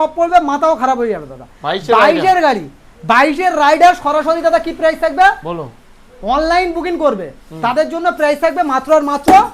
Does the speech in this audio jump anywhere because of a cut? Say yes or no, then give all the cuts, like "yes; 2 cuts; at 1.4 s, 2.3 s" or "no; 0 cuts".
no; 0 cuts